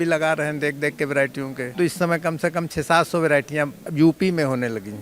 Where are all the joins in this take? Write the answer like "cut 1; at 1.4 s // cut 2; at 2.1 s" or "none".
cut 1; at 1.7 s // cut 2; at 3.8 s